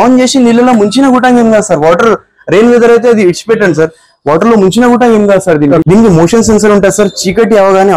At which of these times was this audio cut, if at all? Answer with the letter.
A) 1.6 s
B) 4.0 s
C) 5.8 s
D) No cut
C